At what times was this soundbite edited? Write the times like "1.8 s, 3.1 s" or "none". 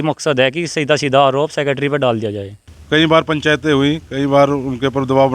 2.7 s